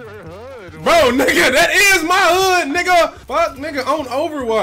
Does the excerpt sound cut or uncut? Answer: uncut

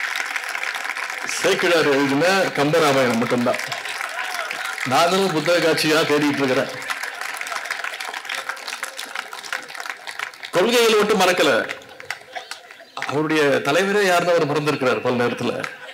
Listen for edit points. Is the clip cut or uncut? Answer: uncut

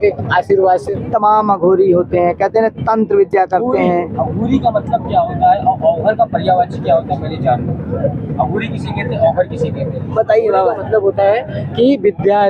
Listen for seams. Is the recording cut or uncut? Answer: cut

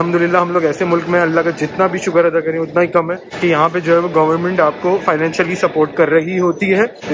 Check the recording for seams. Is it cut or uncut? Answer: uncut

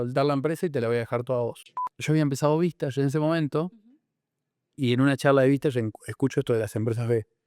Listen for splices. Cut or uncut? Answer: cut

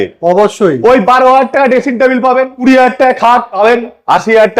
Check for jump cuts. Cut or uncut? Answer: cut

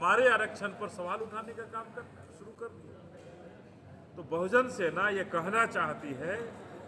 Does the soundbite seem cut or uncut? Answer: uncut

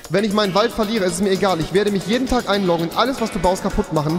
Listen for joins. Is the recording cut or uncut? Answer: uncut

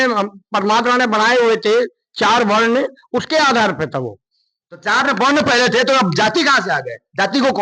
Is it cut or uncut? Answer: uncut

